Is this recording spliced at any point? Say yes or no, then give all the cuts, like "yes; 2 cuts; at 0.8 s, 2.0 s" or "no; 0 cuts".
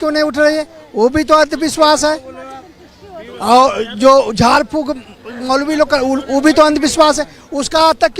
no; 0 cuts